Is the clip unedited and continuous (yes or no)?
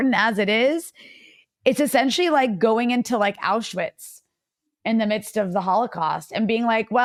yes